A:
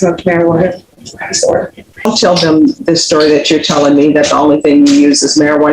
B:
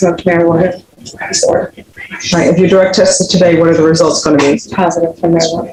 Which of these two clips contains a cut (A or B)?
A